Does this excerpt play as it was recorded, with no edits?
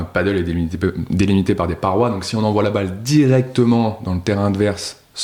yes; 0 cuts

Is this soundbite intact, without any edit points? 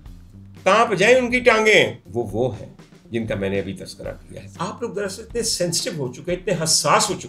no; 2 cuts; at 2.0 s, 4.4 s

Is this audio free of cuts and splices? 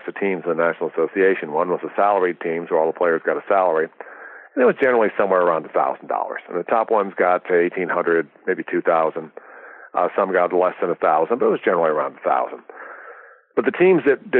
yes; 0 cuts

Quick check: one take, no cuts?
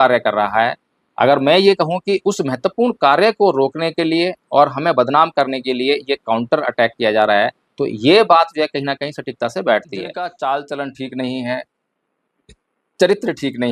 no; 1 cut; at 10.1 s

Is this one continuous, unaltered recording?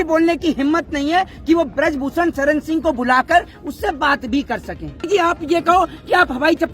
no; 1 cut; at 5.1 s

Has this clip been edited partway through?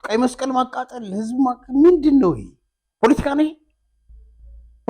no; 0 cuts

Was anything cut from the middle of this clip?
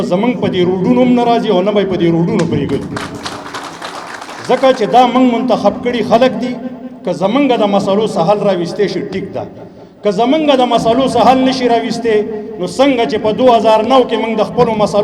no; 0 cuts

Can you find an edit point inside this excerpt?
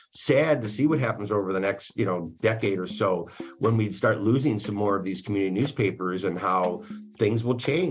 no; 0 cuts

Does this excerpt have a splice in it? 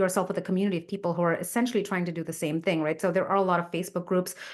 no; 0 cuts

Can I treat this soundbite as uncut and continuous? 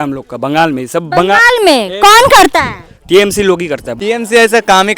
no; 1 cut; at 3.9 s

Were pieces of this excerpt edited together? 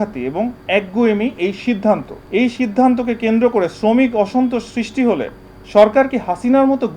yes; 1 cut; at 2.1 s

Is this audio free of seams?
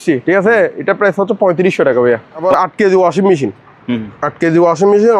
no; 1 cut; at 2.4 s

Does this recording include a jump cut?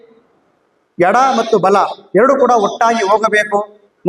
no; 0 cuts

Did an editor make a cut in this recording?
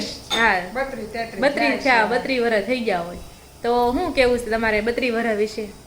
no; 0 cuts

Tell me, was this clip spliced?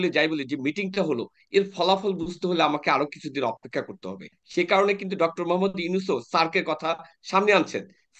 yes; 1 cut; at 4.4 s

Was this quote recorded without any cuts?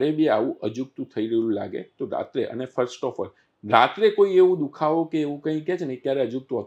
yes; 0 cuts

